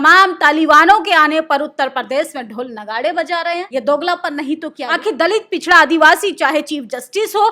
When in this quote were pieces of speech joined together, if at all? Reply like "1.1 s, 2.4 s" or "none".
3.7 s, 4.8 s